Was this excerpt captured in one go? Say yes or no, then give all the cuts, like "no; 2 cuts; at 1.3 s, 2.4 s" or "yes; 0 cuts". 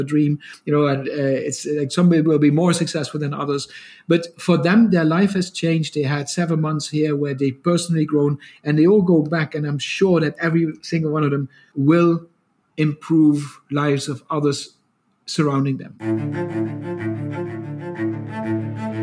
no; 1 cut; at 16.0 s